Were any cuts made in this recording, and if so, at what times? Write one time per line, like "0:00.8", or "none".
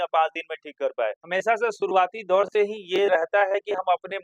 0:01.2